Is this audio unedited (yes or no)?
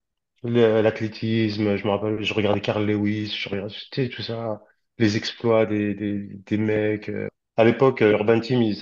no